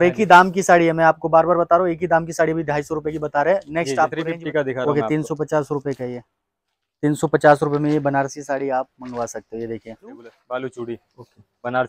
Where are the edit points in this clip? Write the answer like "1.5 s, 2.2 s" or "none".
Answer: 4.2 s, 10.3 s